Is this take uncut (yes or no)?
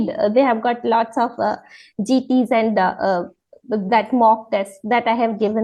yes